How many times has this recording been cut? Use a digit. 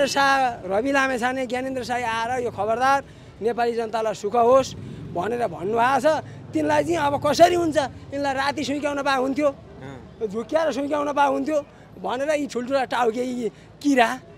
0